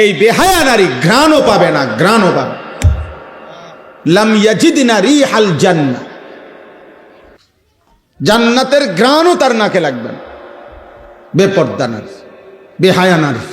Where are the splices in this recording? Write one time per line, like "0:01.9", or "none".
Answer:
0:07.4

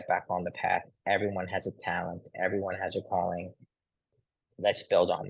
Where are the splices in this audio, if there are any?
0:04.1

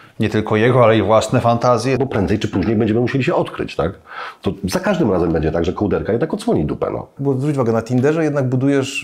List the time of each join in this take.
0:02.0
0:07.2

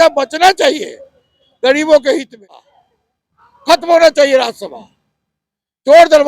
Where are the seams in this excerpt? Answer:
0:02.6

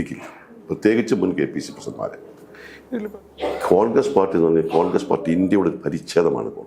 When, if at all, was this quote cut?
0:03.0

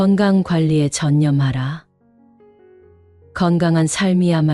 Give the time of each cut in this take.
0:02.0
0:03.3

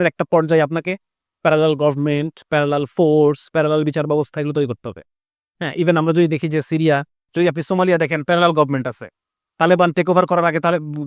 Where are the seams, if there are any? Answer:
0:07.2

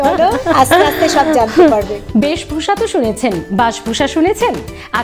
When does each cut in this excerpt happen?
0:02.0

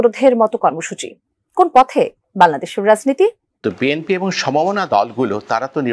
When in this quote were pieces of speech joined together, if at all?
0:03.5

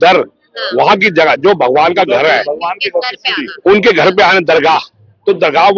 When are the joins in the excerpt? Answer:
none

